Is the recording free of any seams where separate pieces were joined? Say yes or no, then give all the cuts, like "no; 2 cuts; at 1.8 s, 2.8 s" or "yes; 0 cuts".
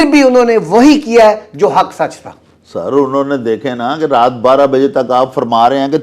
yes; 0 cuts